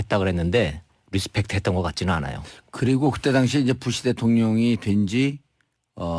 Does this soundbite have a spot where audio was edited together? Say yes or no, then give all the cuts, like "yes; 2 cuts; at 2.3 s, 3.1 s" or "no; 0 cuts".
yes; 1 cut; at 3.1 s